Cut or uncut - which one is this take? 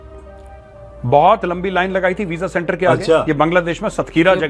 cut